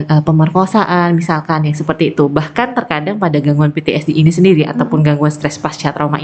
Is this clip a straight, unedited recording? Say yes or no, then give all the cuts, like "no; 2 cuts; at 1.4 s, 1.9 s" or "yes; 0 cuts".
yes; 0 cuts